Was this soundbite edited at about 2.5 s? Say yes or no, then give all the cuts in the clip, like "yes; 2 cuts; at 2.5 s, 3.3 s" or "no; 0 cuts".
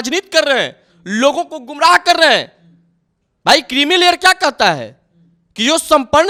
no; 0 cuts